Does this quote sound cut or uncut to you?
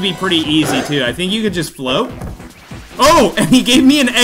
uncut